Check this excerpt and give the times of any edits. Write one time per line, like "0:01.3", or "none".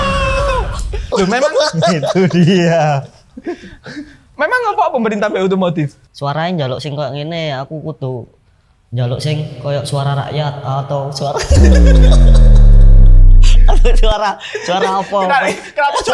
0:06.0